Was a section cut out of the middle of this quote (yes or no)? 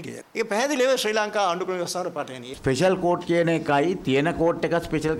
yes